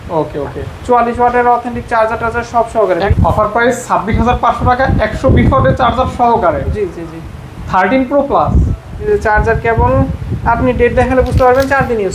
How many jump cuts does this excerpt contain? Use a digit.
2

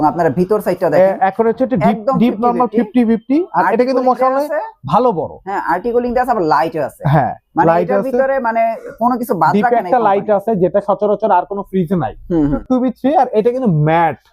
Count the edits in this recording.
1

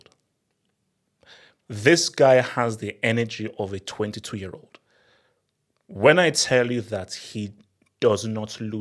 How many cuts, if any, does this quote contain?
0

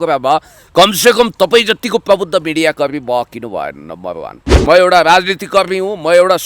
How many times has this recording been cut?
1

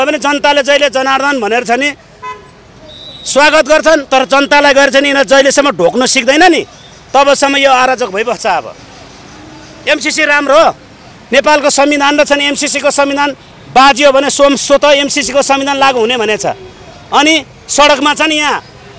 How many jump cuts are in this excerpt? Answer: 0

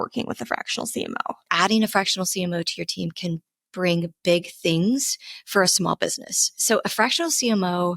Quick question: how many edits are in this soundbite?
1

